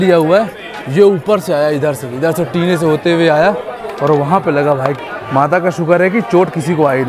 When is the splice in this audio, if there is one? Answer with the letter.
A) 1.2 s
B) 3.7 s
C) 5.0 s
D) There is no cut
C